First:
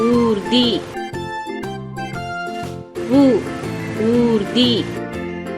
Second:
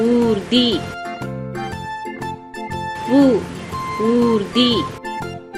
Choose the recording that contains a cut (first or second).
first